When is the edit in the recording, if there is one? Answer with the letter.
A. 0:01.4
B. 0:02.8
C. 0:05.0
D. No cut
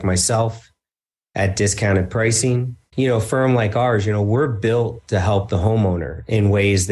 B